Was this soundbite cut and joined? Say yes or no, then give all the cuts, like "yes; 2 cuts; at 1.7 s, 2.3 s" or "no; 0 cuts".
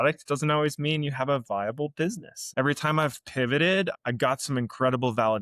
yes; 1 cut; at 2.4 s